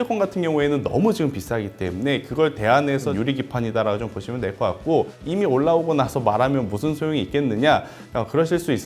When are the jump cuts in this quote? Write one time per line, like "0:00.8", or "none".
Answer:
0:03.1
0:05.2